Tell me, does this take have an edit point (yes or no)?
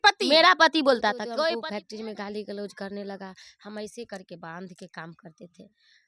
yes